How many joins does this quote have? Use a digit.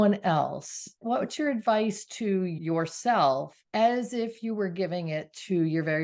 3